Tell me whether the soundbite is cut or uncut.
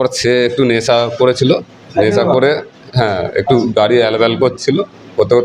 uncut